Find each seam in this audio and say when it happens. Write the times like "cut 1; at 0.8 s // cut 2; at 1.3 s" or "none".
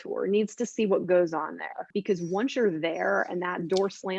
cut 1; at 1.9 s